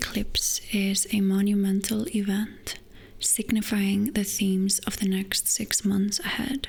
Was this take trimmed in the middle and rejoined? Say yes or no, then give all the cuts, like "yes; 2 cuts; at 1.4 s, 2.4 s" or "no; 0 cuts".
no; 0 cuts